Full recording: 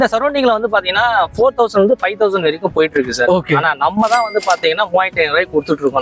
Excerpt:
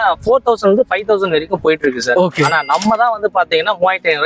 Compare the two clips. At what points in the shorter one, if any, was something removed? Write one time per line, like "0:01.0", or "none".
none